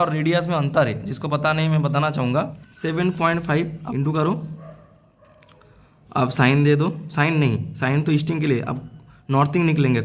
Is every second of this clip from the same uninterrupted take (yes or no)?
no